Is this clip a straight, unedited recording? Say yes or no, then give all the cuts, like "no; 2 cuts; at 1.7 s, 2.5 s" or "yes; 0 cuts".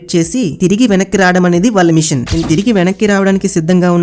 no; 1 cut; at 2.4 s